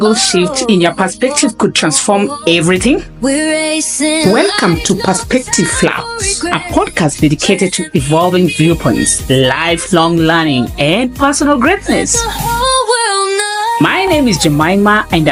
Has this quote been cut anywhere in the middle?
no; 0 cuts

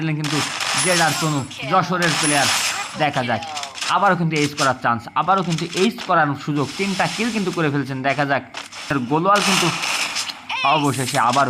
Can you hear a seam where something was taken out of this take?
yes; 1 cut; at 8.9 s

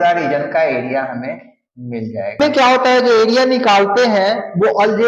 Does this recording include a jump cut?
yes; 1 cut; at 2.4 s

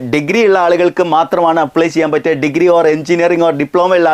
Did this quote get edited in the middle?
no; 0 cuts

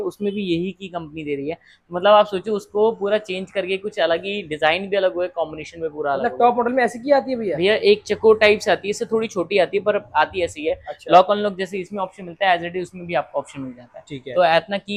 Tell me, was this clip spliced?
no; 0 cuts

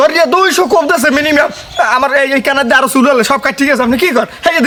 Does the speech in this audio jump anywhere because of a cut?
no; 0 cuts

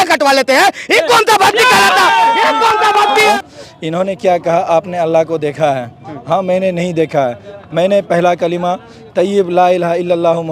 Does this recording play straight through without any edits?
no; 1 cut; at 3.4 s

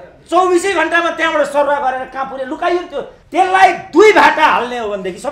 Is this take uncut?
no; 1 cut; at 3.2 s

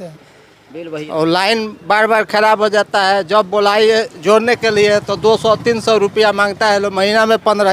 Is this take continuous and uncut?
no; 1 cut; at 1.1 s

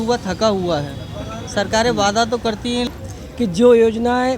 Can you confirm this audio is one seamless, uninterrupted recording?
no; 1 cut; at 2.9 s

